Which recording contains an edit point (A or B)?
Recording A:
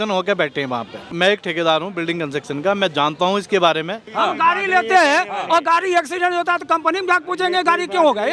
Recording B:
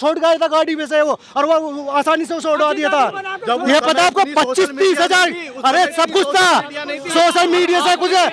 A